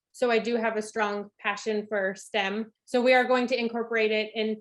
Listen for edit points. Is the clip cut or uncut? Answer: cut